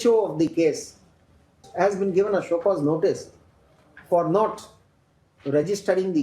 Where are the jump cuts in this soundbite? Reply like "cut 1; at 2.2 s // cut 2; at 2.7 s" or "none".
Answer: cut 1; at 1.6 s